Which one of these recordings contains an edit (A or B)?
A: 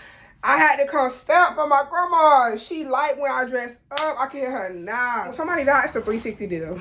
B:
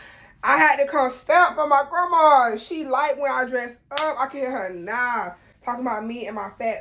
A